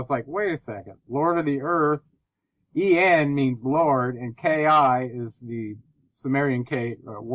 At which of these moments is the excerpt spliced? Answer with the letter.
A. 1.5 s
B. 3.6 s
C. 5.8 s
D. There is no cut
B